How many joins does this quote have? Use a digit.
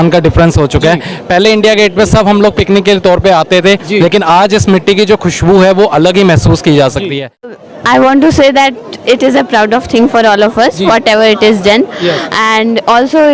1